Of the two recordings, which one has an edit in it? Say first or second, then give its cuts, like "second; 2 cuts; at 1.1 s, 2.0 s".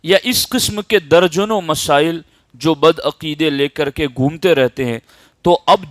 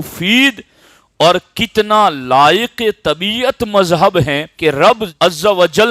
second; 2 cuts; at 4.4 s, 5.1 s